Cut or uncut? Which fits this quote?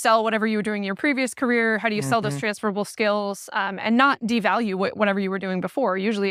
uncut